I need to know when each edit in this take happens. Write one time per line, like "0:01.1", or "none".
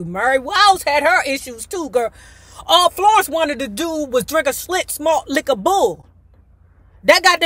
none